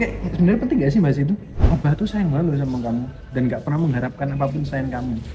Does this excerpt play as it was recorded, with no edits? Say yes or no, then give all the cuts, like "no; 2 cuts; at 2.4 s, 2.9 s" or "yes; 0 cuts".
no; 1 cut; at 1.6 s